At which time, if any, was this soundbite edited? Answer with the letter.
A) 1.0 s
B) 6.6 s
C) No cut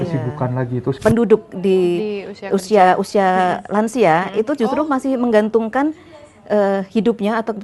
A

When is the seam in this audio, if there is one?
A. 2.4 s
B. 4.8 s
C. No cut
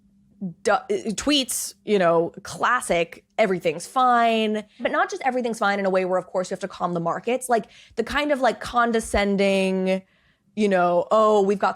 B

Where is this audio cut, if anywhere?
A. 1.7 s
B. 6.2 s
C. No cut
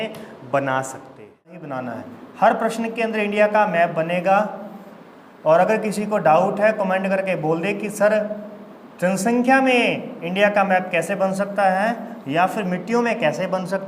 A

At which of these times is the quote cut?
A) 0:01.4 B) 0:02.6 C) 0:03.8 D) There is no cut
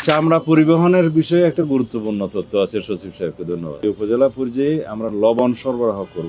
C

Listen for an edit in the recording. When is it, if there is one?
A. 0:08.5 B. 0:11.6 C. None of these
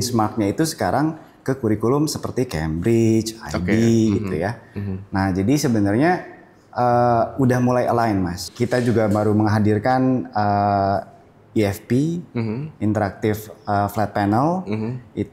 A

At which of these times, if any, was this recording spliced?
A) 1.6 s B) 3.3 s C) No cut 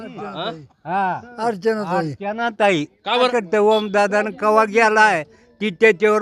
B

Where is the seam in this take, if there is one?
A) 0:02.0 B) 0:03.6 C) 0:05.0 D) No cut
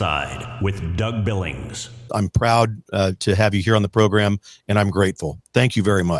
A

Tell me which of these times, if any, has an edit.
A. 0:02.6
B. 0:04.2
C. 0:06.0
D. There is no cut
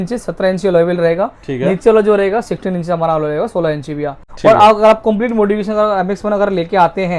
B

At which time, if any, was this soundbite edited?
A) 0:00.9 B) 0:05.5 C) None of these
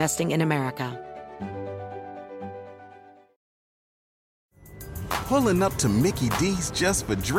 A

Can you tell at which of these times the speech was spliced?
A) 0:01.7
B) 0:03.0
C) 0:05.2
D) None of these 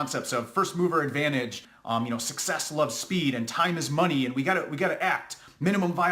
A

